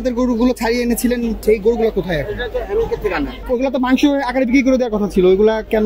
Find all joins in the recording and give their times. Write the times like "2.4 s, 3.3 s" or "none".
1.4 s, 3.4 s